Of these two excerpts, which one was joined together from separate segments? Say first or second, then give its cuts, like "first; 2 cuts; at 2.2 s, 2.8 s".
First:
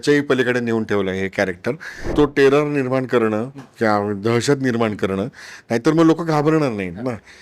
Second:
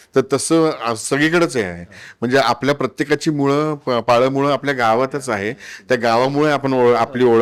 first; 1 cut; at 2.1 s